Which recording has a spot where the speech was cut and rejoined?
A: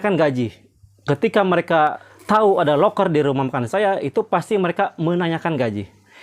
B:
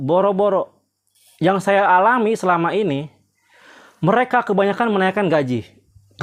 A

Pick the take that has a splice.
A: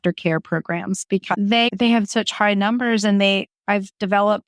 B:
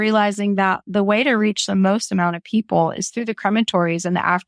A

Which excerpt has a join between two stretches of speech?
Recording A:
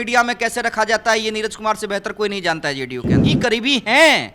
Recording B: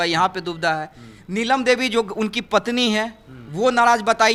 A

